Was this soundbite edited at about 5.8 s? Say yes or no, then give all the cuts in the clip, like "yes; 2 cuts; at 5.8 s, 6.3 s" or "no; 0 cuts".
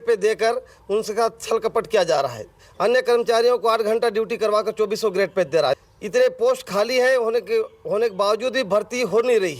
yes; 1 cut; at 5.8 s